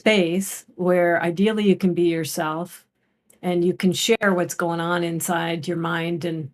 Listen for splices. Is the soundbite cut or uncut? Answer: uncut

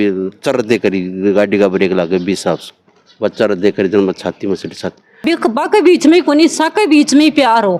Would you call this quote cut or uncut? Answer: cut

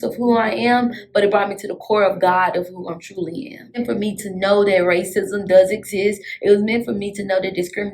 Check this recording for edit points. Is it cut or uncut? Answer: cut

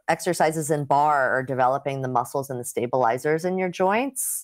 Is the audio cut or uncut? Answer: uncut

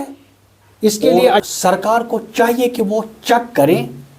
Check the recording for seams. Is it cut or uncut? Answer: cut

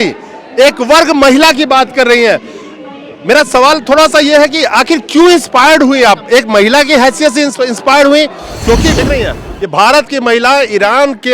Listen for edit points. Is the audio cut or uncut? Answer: cut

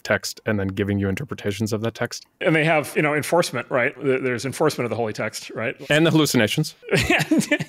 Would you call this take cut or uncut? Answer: cut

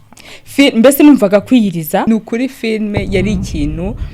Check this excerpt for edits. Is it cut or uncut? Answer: cut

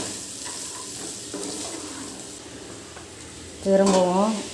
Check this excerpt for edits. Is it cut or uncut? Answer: cut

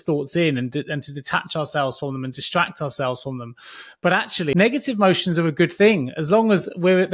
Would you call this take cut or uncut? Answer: cut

